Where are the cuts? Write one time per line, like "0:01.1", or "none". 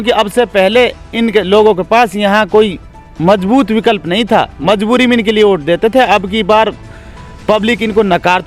none